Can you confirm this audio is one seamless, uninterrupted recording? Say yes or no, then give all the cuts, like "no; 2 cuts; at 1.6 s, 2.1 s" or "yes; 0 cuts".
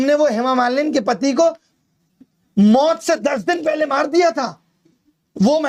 yes; 0 cuts